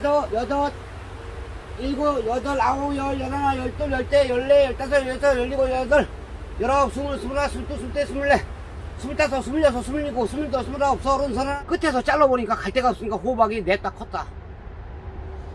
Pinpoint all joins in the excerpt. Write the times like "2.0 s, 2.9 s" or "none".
11.5 s